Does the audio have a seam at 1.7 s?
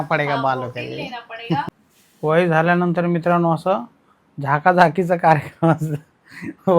yes; 1 cut; at 1.7 s

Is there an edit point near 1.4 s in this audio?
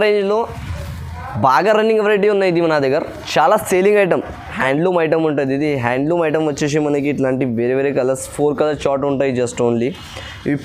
no; 1 cut; at 4.5 s

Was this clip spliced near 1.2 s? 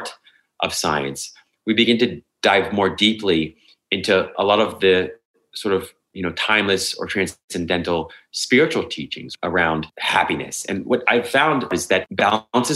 no; 2 cuts; at 9.7 s, 11.7 s

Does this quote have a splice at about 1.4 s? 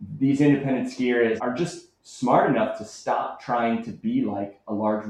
yes; 1 cut; at 1.4 s

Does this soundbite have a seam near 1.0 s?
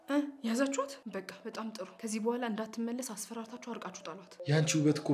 yes; 3 cuts; at 1.0 s, 1.9 s, 4.3 s

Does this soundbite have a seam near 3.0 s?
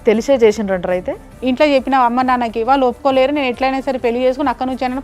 no; 1 cut; at 1.3 s

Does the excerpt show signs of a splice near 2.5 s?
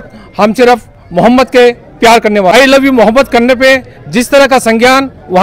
yes; 1 cut; at 2.5 s

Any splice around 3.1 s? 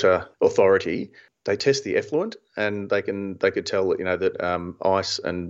no; 1 cut; at 1.6 s

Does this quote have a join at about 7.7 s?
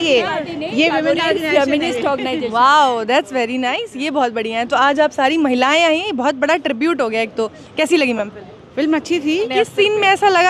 no; 1 cut; at 9.5 s

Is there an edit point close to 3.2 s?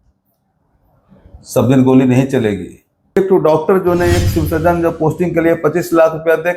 yes; 1 cut; at 3.2 s

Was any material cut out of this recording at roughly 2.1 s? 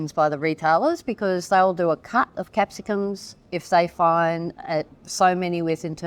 no; 1 cut; at 3.5 s

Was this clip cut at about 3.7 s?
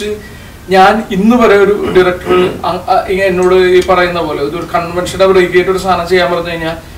no; 0 cuts

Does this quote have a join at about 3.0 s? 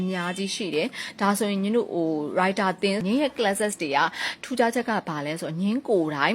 yes; 1 cut; at 3.0 s

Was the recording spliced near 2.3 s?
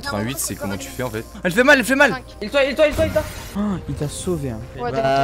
yes; 3 cuts; at 1.3 s, 2.3 s, 3.4 s

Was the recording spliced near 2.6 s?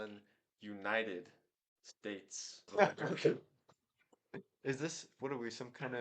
yes; 1 cut; at 2.6 s

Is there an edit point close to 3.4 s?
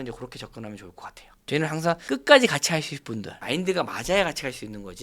yes; 2 cuts; at 1.4 s, 3.4 s

